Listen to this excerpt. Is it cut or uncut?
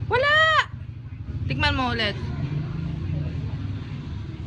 uncut